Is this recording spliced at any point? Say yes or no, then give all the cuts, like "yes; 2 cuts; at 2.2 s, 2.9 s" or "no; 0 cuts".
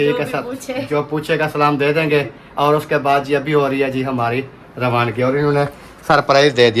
no; 0 cuts